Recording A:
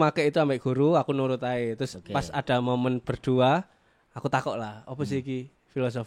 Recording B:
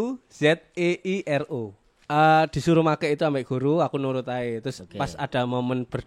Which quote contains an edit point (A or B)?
B